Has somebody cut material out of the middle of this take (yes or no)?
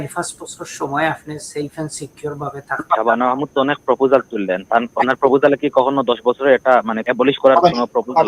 yes